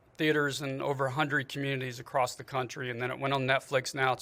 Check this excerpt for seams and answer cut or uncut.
uncut